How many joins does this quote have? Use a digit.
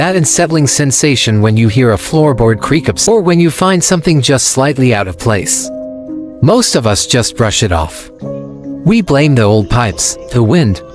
2